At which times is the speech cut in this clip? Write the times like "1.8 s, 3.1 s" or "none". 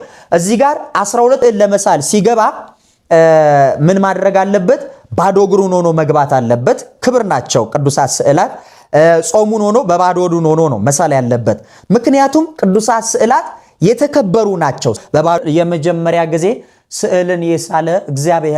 1.4 s, 15.4 s